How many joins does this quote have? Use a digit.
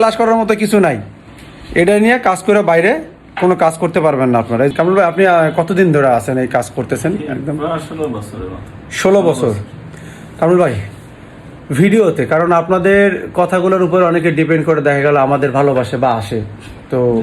1